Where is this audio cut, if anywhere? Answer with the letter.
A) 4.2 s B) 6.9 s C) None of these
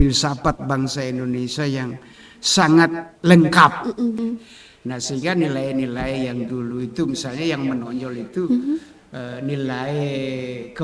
A